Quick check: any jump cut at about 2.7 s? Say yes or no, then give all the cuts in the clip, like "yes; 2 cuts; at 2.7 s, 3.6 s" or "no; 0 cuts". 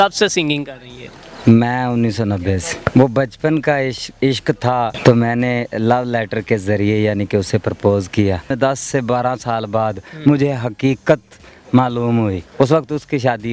yes; 4 cuts; at 2.7 s, 5.0 s, 8.5 s, 12.4 s